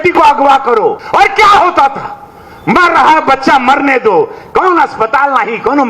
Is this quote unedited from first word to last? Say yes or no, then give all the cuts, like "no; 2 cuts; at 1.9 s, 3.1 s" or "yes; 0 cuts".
no; 1 cut; at 1.0 s